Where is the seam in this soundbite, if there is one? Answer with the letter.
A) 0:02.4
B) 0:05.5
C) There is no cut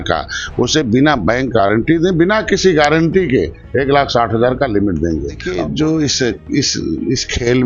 B